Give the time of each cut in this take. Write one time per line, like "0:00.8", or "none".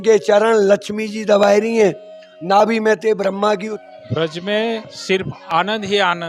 0:03.7